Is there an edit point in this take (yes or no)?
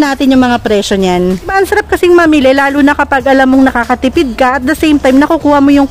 yes